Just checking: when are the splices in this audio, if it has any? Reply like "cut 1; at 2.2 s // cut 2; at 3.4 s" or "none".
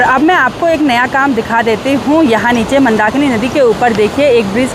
none